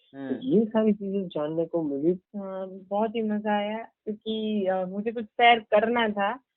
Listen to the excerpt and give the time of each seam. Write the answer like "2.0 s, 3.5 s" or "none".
2.2 s